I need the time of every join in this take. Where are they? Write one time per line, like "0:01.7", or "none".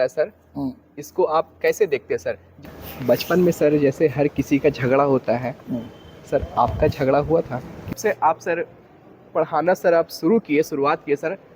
0:02.5
0:08.0